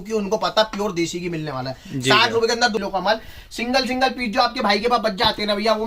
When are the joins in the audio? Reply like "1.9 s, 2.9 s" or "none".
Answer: 2.8 s